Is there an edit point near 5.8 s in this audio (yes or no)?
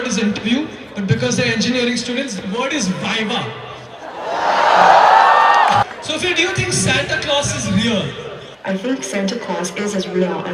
yes